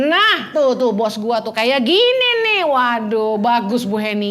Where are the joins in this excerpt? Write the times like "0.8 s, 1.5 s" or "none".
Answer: none